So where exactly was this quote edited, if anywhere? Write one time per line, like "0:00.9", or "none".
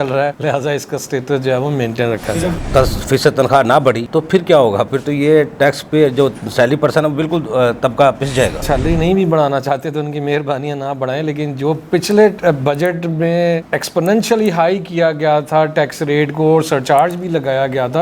0:02.6
0:08.6

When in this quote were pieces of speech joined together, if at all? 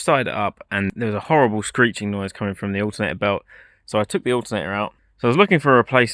0:00.9
0:05.0

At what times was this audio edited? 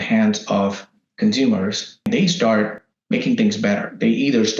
0:02.1

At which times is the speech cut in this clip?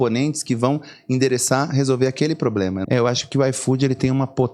0:02.8

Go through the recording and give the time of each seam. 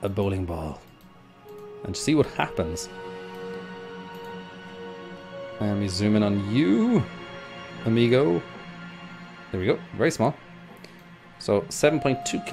0:08.5

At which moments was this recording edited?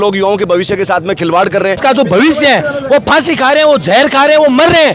0:01.8

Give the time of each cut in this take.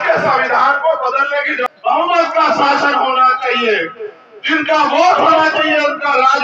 0:01.6

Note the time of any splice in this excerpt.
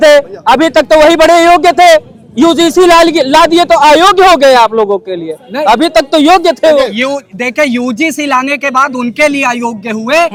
none

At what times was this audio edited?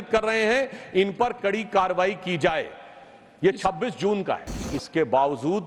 0:04.7

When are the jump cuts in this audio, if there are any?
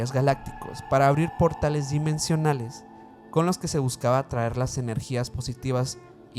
none

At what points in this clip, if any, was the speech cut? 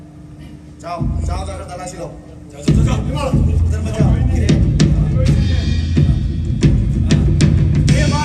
none

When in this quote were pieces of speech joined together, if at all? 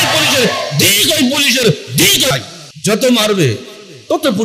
0:02.3

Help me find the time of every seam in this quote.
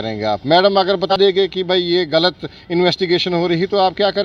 0:01.1

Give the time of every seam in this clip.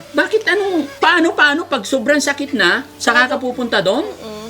0:00.9

